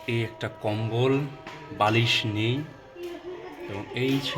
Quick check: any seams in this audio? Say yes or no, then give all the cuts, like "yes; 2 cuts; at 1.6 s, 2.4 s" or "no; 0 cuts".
no; 0 cuts